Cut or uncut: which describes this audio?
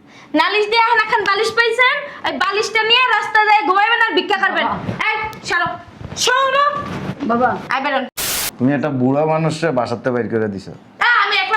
cut